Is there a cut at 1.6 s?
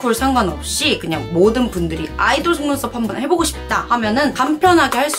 no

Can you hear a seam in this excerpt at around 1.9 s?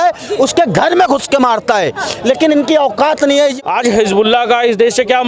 no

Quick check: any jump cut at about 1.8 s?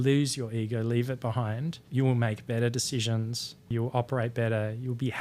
yes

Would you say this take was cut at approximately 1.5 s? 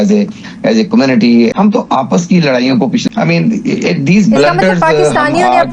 yes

